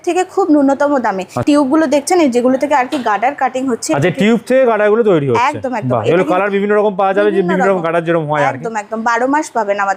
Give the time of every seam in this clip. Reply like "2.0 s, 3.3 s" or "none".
none